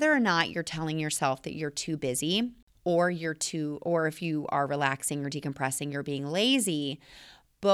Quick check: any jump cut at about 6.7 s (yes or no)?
no